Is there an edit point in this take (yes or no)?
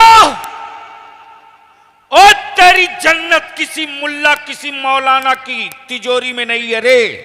no